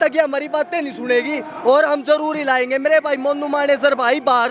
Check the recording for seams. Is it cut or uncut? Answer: uncut